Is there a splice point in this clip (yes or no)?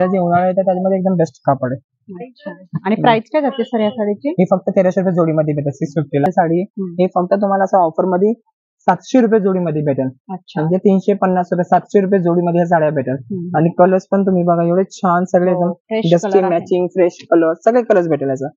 yes